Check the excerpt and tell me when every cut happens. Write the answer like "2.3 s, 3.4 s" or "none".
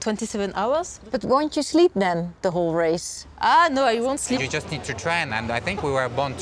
1.0 s, 4.4 s